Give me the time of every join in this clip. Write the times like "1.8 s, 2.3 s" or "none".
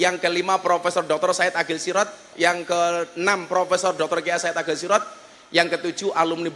2.3 s